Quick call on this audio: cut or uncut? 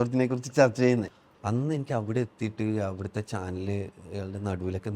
cut